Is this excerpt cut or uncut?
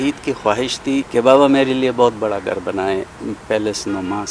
cut